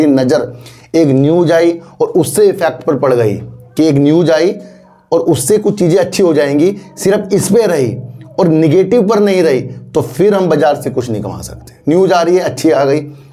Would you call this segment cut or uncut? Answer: uncut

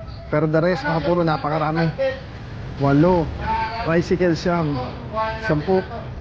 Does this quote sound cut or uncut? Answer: uncut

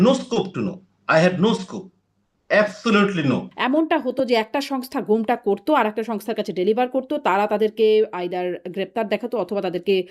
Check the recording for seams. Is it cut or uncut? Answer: cut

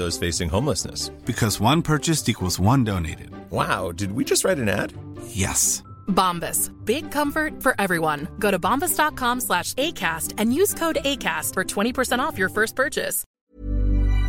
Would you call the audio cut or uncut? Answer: cut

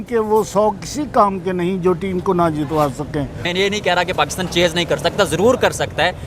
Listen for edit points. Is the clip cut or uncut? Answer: cut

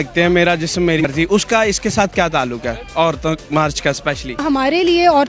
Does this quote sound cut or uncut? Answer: cut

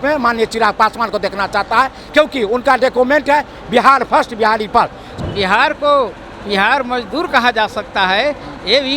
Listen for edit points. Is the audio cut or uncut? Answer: cut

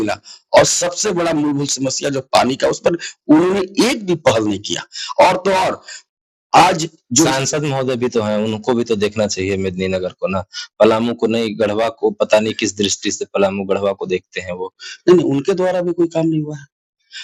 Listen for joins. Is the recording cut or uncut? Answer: uncut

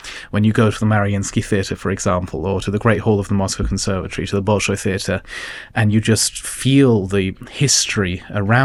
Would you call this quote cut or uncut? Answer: uncut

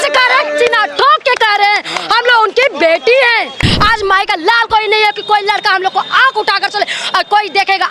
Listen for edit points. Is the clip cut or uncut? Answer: cut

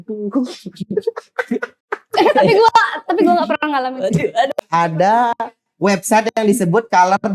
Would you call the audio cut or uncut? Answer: cut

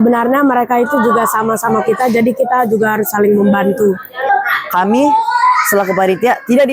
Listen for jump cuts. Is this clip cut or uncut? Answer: cut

